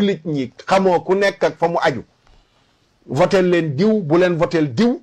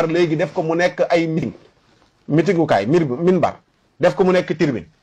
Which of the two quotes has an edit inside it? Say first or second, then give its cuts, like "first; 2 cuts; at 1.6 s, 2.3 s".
second; 1 cut; at 1.4 s